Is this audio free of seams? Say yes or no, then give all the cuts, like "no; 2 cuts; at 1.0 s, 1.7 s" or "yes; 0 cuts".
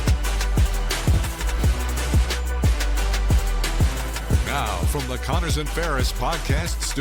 yes; 0 cuts